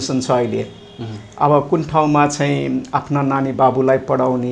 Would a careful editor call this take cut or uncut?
uncut